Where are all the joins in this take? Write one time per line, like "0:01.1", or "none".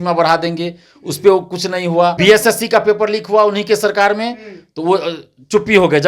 0:02.2